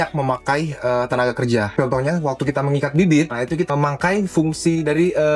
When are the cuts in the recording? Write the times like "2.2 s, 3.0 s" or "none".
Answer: 1.7 s, 3.3 s